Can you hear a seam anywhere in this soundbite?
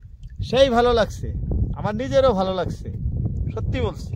no; 0 cuts

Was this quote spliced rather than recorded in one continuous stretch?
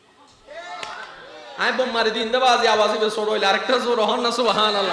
no; 0 cuts

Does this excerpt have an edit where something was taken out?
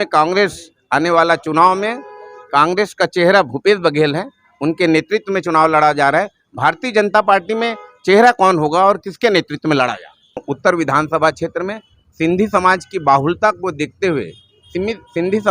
yes; 1 cut; at 10.5 s

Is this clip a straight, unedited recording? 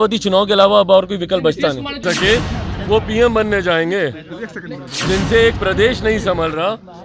no; 1 cut; at 2.0 s

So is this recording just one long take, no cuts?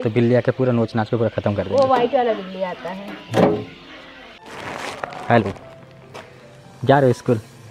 no; 1 cut; at 4.5 s

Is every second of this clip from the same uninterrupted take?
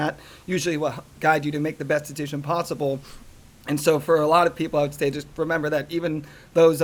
yes; 0 cuts

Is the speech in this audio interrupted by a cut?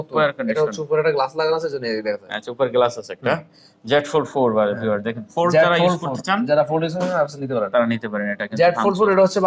no; 0 cuts

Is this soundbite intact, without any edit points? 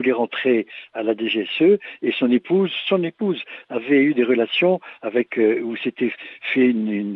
yes; 0 cuts

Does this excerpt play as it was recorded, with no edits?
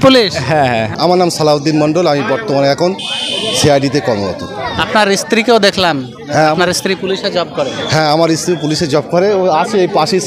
no; 1 cut; at 0.9 s

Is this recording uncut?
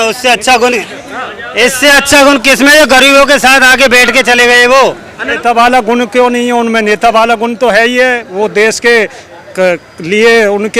no; 1 cut; at 5.3 s

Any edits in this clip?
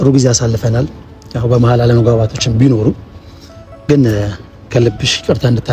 no; 0 cuts

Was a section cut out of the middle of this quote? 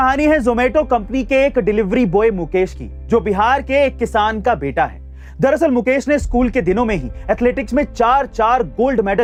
no; 0 cuts

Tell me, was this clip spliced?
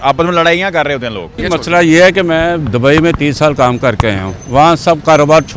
yes; 1 cut; at 1.4 s

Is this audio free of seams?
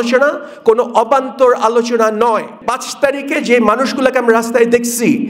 no; 1 cut; at 2.6 s

